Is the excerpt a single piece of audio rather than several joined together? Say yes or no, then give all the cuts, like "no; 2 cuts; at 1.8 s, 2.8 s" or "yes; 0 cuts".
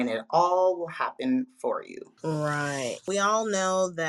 no; 2 cuts; at 2.0 s, 3.0 s